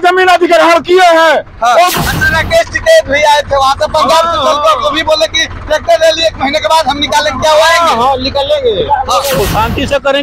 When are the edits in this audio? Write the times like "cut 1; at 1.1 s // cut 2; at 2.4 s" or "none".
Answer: cut 1; at 1.9 s // cut 2; at 9.4 s